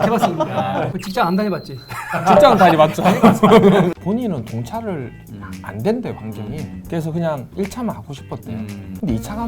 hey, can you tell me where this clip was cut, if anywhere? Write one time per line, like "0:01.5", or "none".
0:04.0